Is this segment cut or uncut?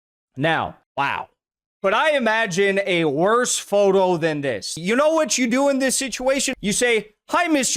cut